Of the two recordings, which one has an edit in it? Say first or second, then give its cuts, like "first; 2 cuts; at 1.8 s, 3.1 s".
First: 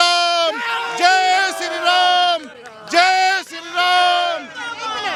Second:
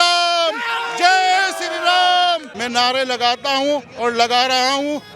second; 1 cut; at 2.6 s